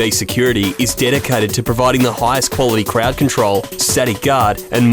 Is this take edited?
no; 0 cuts

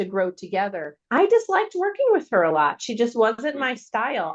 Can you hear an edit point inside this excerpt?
yes; 1 cut; at 0.9 s

